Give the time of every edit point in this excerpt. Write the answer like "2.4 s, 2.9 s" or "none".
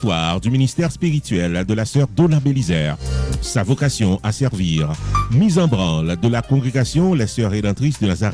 none